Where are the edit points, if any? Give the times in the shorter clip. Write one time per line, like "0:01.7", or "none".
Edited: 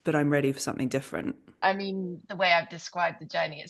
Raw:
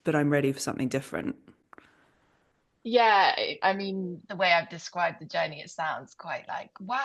0:01.5